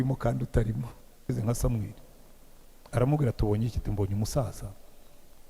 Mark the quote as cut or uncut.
cut